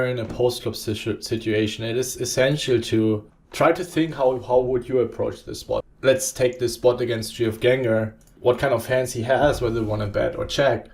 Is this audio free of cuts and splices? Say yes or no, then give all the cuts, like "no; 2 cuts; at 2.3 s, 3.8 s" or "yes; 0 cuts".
no; 3 cuts; at 3.4 s, 5.9 s, 8.3 s